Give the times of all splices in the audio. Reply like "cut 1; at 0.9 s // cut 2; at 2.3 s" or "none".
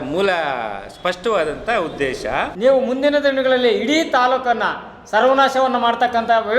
cut 1; at 2.5 s